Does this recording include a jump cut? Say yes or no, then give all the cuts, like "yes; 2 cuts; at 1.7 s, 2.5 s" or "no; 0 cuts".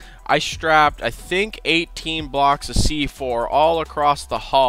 no; 0 cuts